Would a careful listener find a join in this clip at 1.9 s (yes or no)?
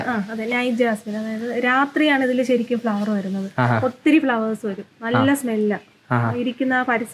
no